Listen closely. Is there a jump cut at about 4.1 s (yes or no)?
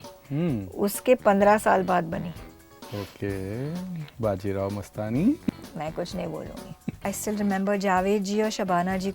no